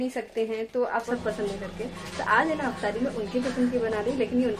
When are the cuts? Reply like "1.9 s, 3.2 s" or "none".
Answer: 1.1 s